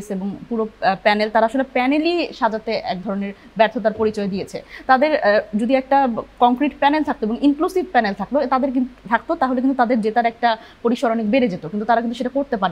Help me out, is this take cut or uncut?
uncut